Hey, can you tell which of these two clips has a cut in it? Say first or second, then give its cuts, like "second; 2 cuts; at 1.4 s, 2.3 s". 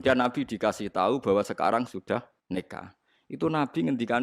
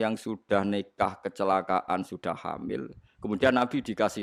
first; 1 cut; at 2.4 s